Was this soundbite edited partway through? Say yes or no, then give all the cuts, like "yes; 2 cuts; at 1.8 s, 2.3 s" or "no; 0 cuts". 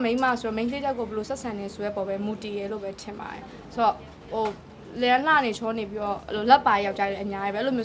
no; 0 cuts